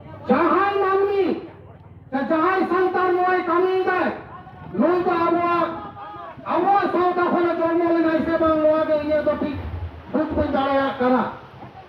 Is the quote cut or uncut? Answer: uncut